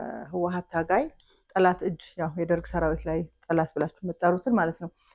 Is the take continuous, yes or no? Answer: yes